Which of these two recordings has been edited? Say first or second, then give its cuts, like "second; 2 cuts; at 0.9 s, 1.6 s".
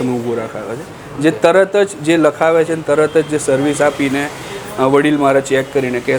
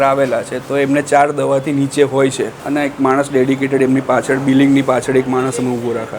second; 1 cut; at 2.5 s